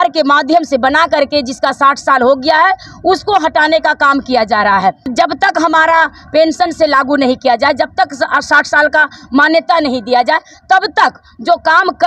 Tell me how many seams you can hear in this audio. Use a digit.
1